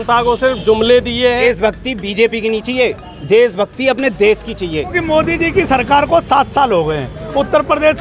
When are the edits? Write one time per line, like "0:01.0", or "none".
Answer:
0:01.4
0:04.9